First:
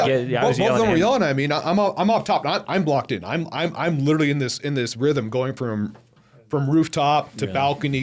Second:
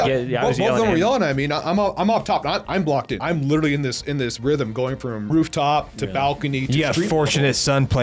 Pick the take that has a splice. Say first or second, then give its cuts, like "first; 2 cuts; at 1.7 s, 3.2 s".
second; 2 cuts; at 3.2 s, 5.3 s